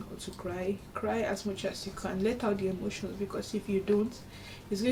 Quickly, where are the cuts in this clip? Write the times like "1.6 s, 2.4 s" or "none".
none